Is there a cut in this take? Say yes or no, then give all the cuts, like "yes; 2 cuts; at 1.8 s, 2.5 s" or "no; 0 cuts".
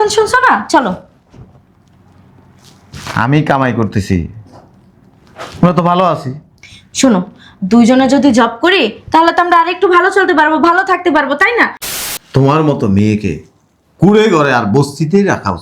yes; 1 cut; at 11.9 s